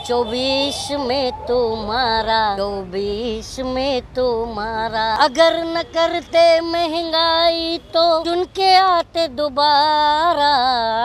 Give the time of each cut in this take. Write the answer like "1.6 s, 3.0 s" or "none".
2.6 s, 5.2 s, 8.2 s